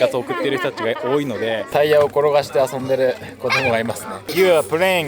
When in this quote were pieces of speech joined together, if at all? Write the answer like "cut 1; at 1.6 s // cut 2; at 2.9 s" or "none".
cut 1; at 1.6 s // cut 2; at 4.2 s

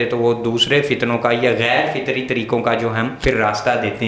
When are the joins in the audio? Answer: cut 1; at 3.1 s

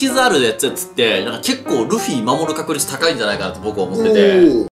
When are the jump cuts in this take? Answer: none

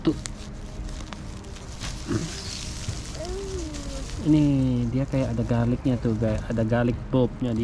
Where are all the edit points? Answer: none

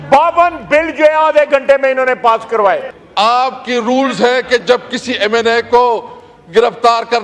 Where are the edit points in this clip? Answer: cut 1; at 3.0 s

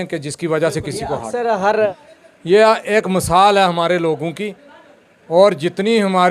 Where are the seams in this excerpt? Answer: cut 1; at 2.0 s

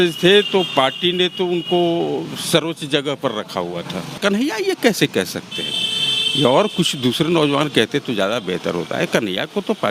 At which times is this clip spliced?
cut 1; at 4.2 s

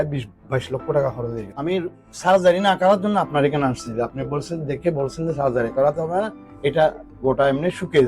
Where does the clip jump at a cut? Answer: cut 1; at 1.4 s

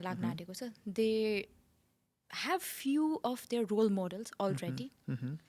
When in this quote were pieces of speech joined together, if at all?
none

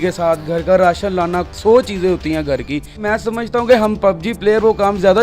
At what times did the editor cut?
cut 1; at 3.0 s

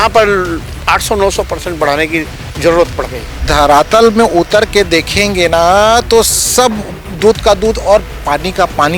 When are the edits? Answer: cut 1; at 3.4 s

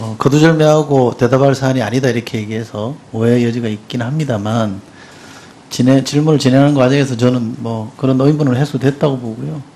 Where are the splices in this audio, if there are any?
cut 1; at 6.5 s

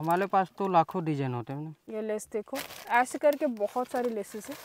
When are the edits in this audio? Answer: cut 1; at 1.8 s

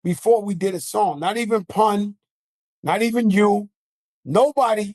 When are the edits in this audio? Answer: none

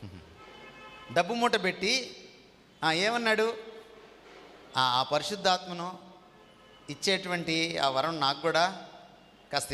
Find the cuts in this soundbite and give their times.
none

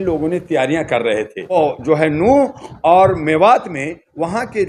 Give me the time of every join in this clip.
cut 1; at 1.6 s

